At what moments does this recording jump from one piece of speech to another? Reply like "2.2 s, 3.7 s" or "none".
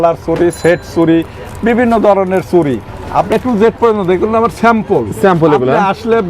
3.3 s